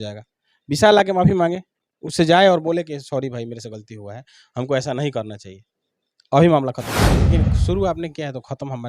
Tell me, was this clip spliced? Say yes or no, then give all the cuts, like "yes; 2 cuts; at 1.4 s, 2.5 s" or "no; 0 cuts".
yes; 1 cut; at 7.3 s